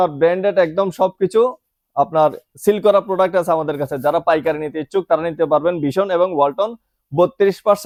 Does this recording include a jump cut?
no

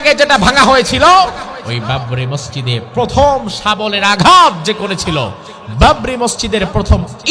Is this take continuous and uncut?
no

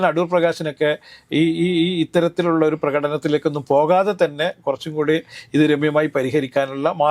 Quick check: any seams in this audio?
no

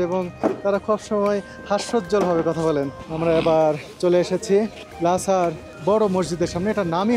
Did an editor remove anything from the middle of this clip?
yes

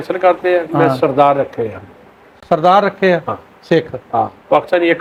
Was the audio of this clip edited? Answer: no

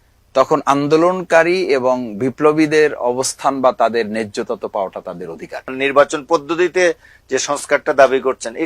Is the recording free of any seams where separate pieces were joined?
no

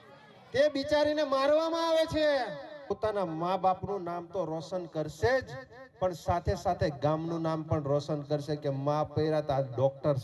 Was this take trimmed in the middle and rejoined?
yes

